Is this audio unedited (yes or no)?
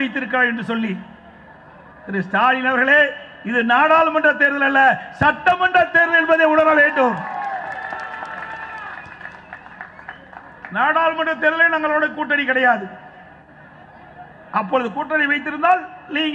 yes